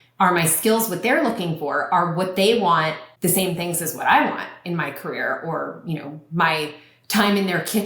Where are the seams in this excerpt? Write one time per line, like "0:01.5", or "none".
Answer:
0:03.1